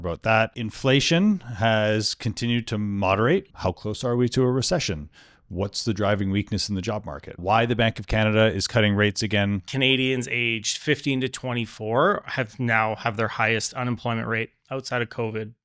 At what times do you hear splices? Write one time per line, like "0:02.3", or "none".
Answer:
0:03.5
0:07.4
0:09.7